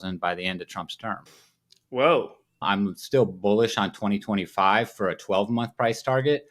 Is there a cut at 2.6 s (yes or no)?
yes